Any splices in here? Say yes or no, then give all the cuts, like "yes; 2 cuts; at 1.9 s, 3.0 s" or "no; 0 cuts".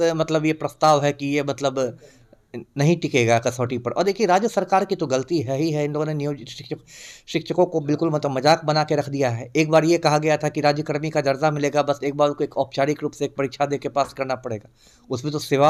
no; 0 cuts